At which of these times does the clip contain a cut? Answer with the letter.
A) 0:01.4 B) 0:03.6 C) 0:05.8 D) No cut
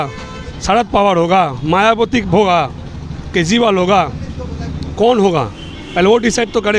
D